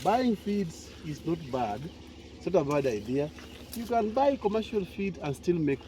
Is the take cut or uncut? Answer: uncut